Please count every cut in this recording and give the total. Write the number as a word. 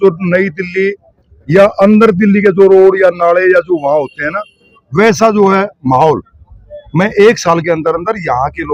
zero